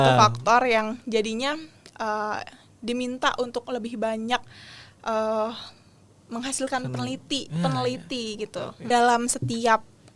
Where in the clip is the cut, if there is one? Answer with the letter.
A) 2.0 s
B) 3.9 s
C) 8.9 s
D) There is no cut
C